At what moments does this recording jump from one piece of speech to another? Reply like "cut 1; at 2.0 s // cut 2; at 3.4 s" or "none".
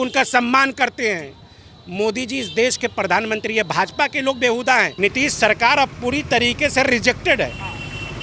cut 1; at 4.9 s